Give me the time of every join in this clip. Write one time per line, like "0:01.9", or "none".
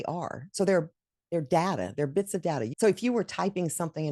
0:02.7